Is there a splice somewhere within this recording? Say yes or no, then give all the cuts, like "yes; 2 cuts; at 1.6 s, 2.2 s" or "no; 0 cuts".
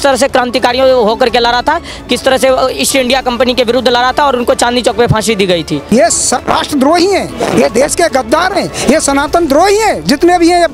yes; 1 cut; at 5.9 s